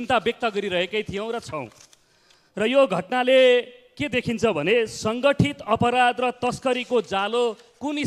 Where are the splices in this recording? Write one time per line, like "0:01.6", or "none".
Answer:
none